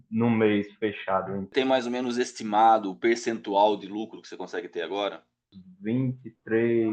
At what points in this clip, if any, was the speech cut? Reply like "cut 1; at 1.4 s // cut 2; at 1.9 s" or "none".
cut 1; at 1.4 s // cut 2; at 5.5 s